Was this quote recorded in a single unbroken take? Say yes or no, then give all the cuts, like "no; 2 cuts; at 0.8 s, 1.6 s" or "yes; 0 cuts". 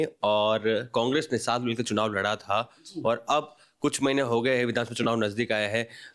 yes; 0 cuts